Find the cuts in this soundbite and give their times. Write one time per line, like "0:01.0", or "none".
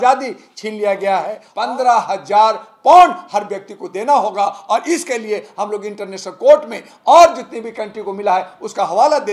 0:01.4